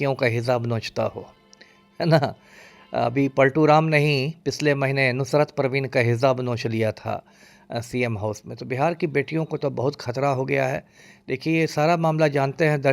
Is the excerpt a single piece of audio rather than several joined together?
yes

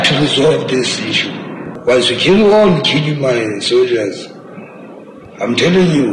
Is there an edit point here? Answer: yes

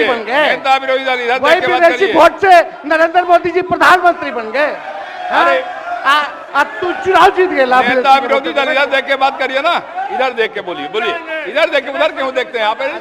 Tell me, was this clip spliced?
no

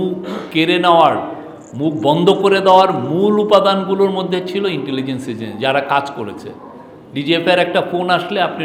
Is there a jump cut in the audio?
no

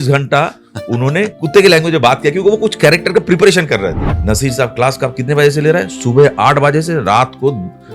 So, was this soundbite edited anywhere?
yes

